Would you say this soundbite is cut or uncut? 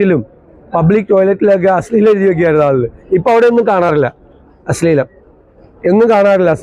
uncut